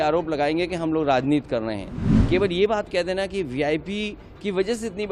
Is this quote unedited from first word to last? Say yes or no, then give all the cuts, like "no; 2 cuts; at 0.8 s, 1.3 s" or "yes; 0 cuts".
no; 1 cut; at 2.1 s